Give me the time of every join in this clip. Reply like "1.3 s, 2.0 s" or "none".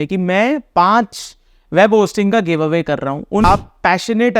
3.4 s